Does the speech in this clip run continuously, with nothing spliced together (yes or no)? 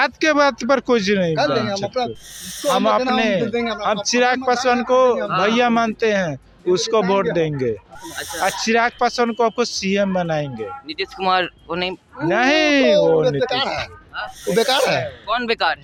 yes